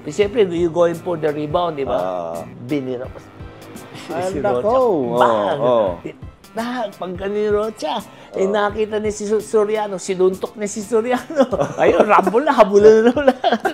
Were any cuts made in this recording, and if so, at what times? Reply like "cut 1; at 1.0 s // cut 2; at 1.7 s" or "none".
none